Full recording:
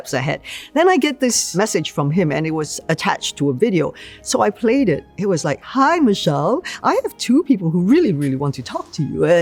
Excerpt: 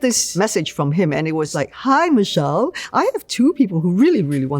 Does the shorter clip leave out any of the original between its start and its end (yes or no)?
yes